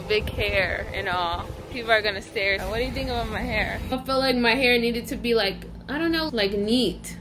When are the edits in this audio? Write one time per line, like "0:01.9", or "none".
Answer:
0:02.6
0:04.0